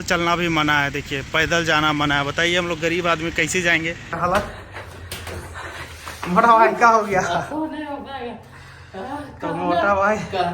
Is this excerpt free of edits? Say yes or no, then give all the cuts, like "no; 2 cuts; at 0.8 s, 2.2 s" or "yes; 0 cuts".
no; 1 cut; at 4.1 s